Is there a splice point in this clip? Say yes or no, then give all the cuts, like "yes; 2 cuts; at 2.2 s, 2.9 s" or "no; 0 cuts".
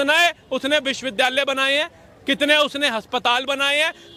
no; 0 cuts